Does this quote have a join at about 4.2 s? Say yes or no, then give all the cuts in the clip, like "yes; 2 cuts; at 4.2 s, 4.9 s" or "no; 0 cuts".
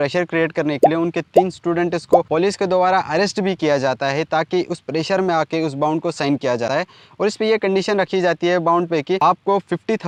no; 0 cuts